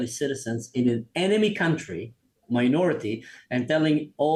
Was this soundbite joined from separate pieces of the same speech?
no; 0 cuts

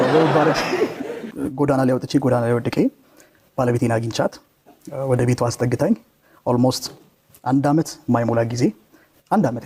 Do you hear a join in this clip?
no; 0 cuts

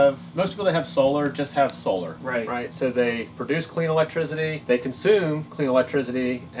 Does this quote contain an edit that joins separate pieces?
yes; 2 cuts; at 2.2 s, 4.6 s

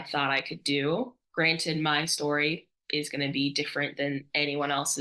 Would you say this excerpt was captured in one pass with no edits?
no; 1 cut; at 1.2 s

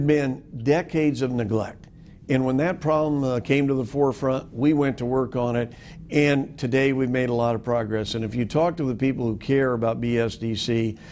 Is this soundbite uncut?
yes; 0 cuts

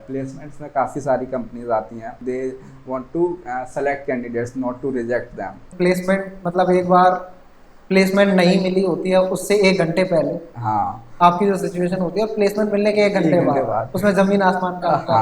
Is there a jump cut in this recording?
yes; 2 cuts; at 2.2 s, 5.6 s

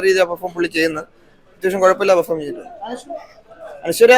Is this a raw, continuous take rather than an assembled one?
yes; 0 cuts

